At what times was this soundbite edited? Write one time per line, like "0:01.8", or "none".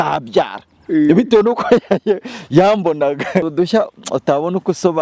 0:03.5